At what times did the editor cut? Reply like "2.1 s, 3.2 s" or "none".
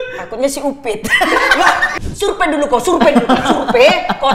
1.9 s